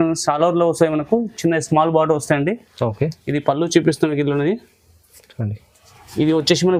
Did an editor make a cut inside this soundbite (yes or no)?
no